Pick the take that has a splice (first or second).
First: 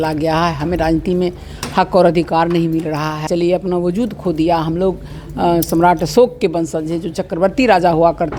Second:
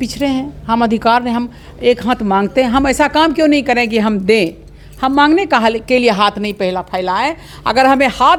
first